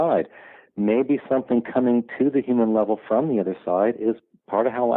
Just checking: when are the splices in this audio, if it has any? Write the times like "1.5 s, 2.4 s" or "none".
none